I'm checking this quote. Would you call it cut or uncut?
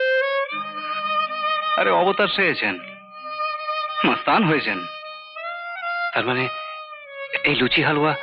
uncut